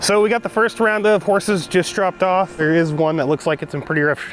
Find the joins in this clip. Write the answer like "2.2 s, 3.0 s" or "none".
2.6 s